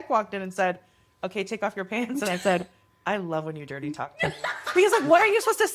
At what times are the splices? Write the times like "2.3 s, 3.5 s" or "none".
none